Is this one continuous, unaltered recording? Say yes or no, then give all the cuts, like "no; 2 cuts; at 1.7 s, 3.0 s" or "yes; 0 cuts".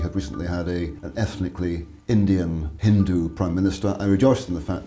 no; 3 cuts; at 1.0 s, 1.9 s, 2.7 s